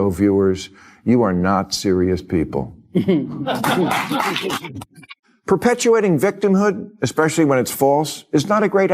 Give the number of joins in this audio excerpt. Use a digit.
1